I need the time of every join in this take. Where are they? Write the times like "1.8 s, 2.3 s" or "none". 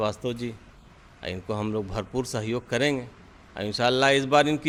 none